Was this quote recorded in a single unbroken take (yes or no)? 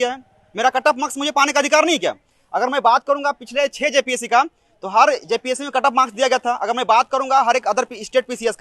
yes